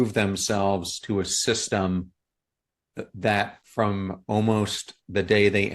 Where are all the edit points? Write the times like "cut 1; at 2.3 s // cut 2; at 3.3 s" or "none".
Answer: cut 1; at 3.6 s